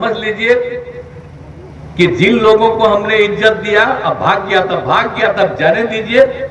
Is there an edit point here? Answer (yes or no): no